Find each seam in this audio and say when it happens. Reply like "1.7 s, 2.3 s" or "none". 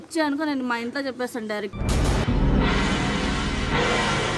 1.7 s